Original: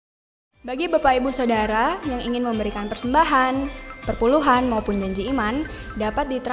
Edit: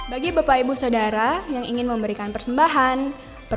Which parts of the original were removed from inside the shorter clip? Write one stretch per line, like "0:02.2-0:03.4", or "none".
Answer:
none